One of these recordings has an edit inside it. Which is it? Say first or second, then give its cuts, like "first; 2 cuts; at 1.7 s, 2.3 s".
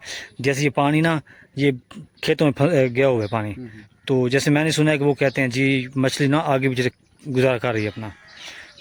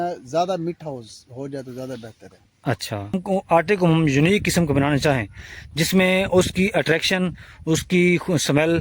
second; 1 cut; at 3.2 s